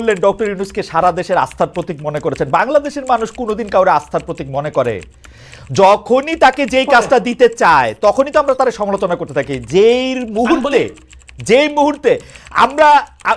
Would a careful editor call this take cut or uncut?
uncut